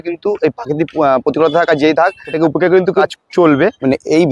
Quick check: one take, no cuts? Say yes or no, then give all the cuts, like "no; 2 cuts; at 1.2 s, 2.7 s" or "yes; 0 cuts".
no; 2 cuts; at 2.3 s, 3.4 s